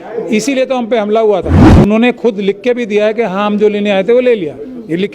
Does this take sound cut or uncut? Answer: cut